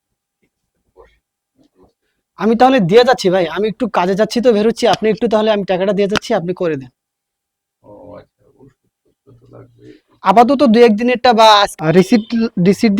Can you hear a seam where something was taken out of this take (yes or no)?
yes